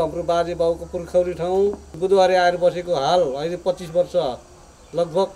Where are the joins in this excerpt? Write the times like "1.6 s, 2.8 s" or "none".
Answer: 1.9 s